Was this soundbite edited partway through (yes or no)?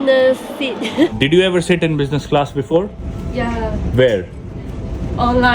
yes